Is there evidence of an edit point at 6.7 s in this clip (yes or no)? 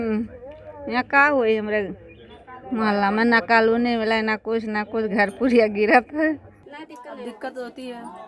yes